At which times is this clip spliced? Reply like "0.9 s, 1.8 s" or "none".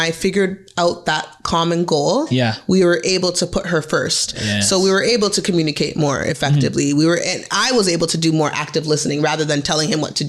none

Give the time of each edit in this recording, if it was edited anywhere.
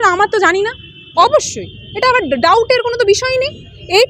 0.9 s

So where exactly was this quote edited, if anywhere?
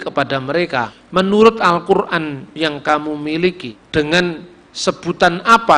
1.0 s, 3.7 s

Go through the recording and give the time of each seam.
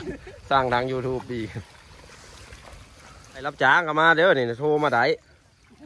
3.5 s

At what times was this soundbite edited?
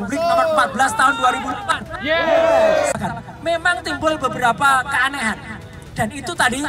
3.0 s

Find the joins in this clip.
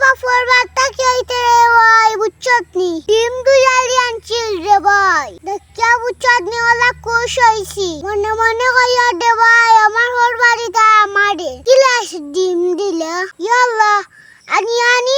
none

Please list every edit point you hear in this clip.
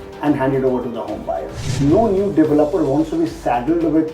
1.6 s

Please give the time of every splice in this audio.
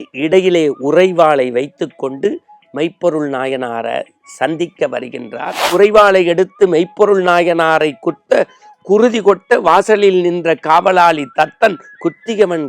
5.6 s

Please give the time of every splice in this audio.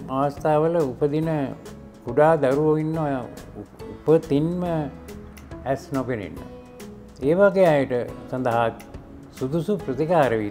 none

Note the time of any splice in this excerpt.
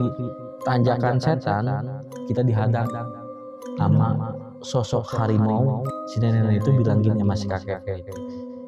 6.0 s

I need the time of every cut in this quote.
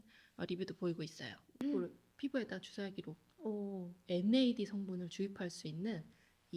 1.4 s

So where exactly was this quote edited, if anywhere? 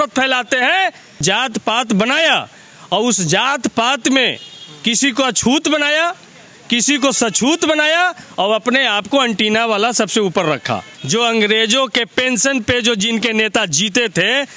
1.2 s, 10.9 s

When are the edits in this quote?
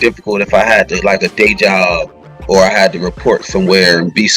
none

